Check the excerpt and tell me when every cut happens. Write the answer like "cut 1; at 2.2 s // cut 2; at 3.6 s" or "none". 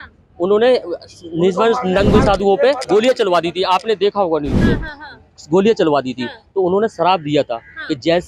none